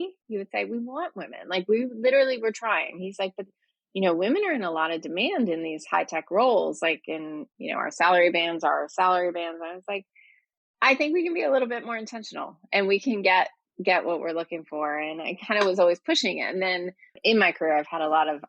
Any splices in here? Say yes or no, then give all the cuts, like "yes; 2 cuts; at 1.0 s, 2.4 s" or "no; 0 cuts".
yes; 1 cut; at 17.1 s